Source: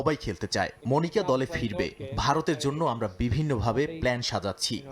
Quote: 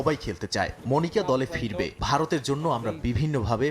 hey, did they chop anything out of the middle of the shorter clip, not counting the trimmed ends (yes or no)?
yes